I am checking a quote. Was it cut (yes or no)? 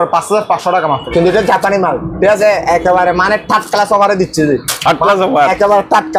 yes